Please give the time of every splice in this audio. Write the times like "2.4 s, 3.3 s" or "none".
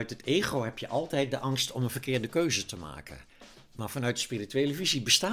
none